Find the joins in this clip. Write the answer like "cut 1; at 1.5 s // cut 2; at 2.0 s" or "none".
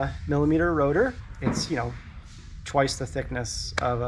cut 1; at 1.3 s